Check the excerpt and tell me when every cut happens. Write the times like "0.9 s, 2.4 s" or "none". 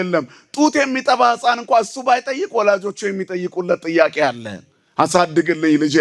none